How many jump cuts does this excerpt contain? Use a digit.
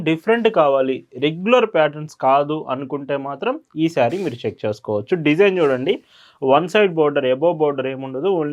0